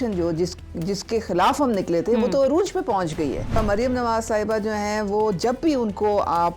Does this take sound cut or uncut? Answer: cut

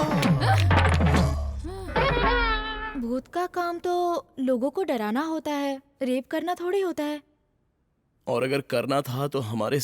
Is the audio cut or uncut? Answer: cut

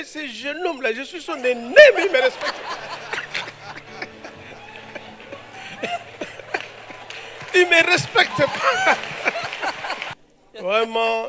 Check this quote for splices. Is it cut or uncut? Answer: cut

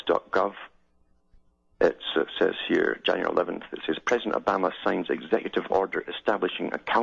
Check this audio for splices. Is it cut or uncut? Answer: cut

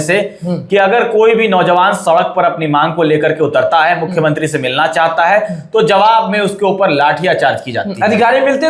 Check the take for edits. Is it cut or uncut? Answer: uncut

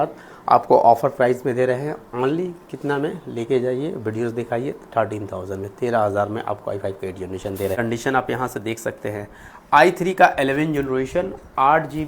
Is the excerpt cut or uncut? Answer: cut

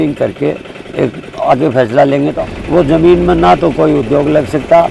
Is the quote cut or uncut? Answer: cut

